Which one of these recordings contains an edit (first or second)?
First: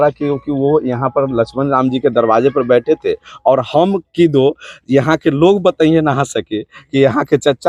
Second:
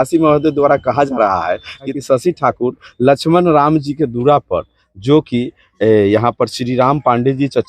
second